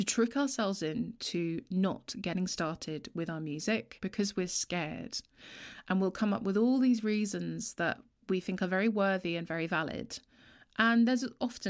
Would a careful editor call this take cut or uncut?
cut